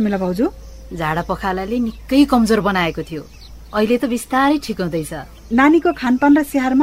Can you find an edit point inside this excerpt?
yes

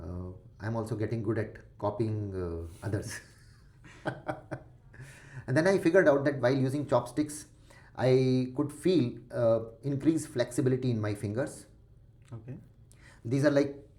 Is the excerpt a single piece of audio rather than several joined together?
yes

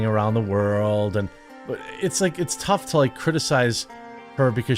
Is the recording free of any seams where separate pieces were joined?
no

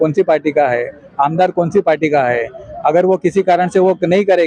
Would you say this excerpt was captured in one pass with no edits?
yes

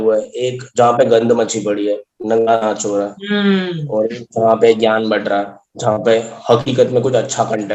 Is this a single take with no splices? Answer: yes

